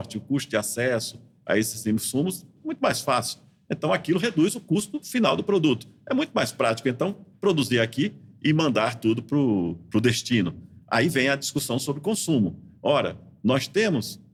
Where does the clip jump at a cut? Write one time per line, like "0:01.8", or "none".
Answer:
none